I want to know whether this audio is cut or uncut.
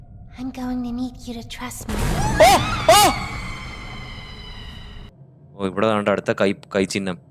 cut